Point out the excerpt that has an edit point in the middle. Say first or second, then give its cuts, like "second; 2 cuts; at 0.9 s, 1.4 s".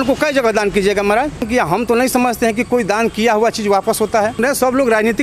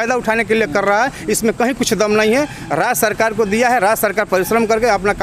first; 2 cuts; at 1.4 s, 4.4 s